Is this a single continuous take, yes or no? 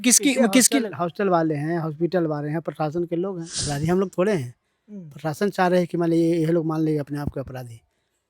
no